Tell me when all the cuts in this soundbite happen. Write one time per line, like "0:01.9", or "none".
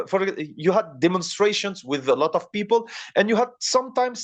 none